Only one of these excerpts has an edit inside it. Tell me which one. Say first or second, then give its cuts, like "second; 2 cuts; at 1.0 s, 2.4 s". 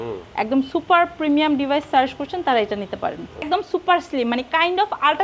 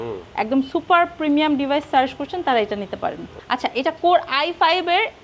first; 1 cut; at 3.5 s